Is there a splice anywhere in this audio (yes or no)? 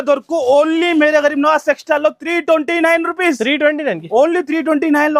no